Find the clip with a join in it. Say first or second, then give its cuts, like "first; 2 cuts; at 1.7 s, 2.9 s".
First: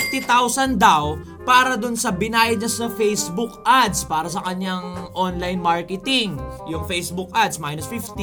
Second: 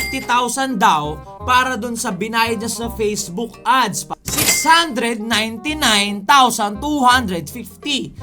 second; 1 cut; at 4.0 s